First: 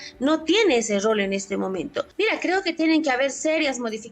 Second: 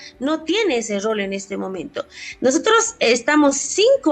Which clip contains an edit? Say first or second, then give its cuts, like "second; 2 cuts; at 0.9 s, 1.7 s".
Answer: first; 1 cut; at 2.0 s